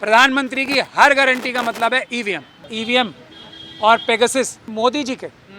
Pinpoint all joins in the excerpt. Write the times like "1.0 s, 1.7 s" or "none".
2.7 s, 4.6 s

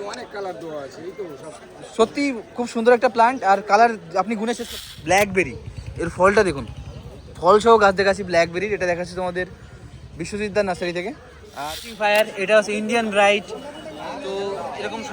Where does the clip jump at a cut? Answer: 4.8 s, 11.7 s

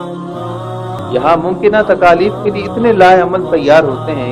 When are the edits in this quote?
1.0 s

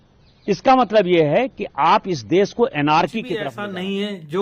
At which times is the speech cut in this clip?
3.5 s

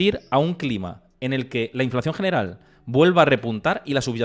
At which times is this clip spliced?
none

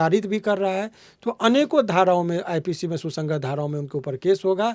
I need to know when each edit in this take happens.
none

